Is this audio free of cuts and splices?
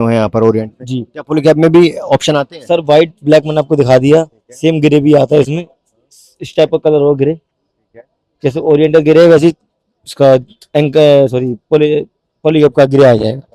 yes; 0 cuts

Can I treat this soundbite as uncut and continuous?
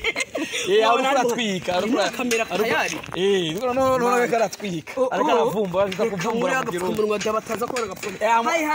yes; 0 cuts

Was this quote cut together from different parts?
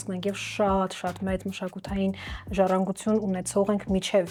no; 0 cuts

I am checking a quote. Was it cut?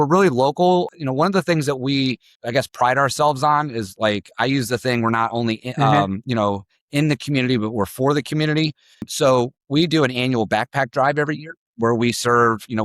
yes; 3 cuts; at 0.9 s, 2.3 s, 9.1 s

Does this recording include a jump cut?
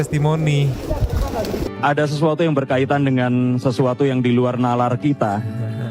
yes; 1 cut; at 1.7 s

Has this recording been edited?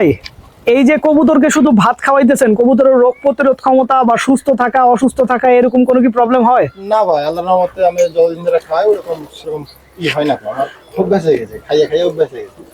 no; 0 cuts

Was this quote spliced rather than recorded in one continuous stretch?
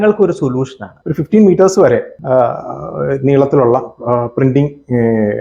yes; 1 cut; at 0.9 s

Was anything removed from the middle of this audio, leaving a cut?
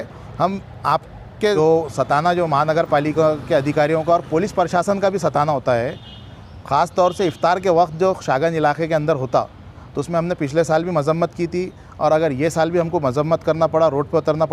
yes; 1 cut; at 1.6 s

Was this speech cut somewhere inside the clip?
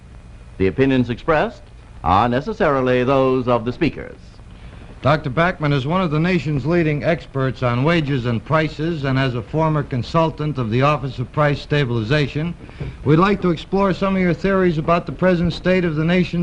no; 0 cuts

